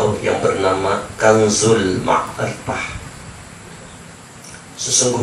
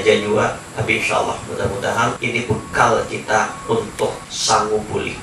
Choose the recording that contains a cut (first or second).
second